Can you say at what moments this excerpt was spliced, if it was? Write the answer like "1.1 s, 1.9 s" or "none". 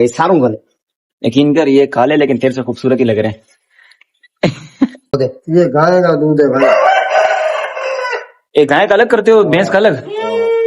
5.0 s